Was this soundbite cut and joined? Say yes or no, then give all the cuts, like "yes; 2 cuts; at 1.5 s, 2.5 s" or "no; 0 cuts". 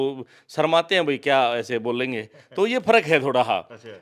no; 0 cuts